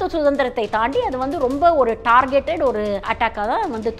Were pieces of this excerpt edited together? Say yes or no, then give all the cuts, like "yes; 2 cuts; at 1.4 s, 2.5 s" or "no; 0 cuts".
yes; 1 cut; at 3.1 s